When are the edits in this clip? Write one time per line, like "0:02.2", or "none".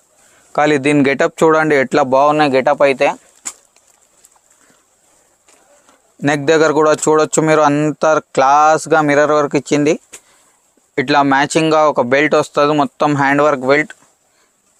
none